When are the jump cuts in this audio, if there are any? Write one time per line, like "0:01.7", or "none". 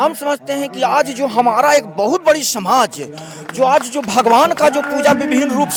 none